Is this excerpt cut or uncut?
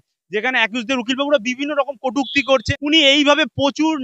cut